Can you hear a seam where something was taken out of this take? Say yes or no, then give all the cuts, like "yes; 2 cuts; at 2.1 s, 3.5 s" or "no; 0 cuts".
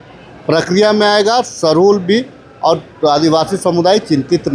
no; 0 cuts